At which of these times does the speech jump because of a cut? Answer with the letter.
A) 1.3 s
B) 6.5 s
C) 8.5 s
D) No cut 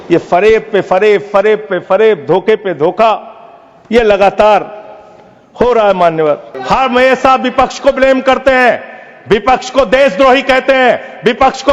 B